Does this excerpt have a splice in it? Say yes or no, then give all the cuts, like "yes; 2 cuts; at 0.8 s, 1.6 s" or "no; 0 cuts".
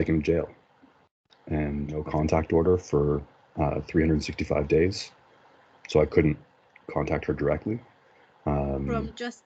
yes; 1 cut; at 1.9 s